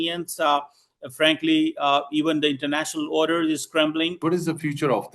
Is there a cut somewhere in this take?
yes; 1 cut; at 4.2 s

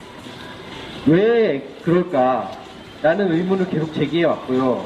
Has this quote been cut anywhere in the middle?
no; 0 cuts

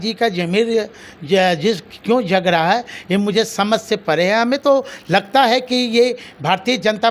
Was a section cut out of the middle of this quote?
no; 0 cuts

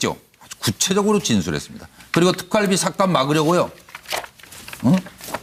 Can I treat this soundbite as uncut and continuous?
yes; 0 cuts

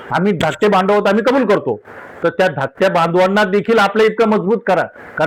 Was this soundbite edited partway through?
no; 0 cuts

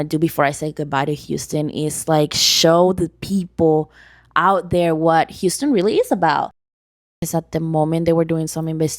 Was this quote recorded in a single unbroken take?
no; 1 cut; at 6.9 s

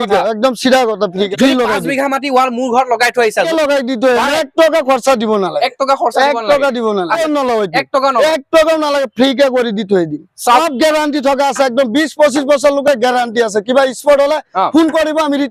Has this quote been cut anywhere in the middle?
yes; 4 cuts; at 1.3 s, 3.5 s, 7.2 s, 10.6 s

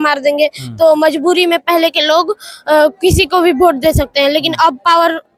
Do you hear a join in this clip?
no; 0 cuts

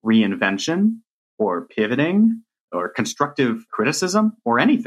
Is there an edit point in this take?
yes; 2 cuts; at 2.7 s, 3.7 s

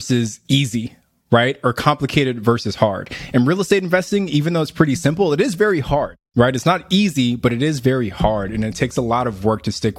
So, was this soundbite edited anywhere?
yes; 1 cut; at 6.2 s

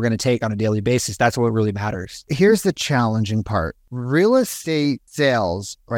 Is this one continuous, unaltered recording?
no; 3 cuts; at 2.3 s, 3.9 s, 4.8 s

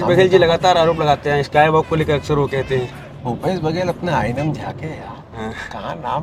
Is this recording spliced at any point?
no; 0 cuts

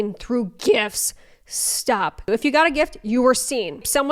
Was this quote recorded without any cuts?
yes; 0 cuts

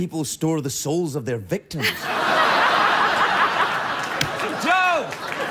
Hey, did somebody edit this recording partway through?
no; 0 cuts

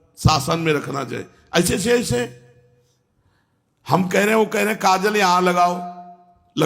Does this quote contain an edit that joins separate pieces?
no; 0 cuts

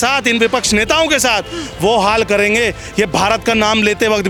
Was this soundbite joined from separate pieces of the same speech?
no; 0 cuts

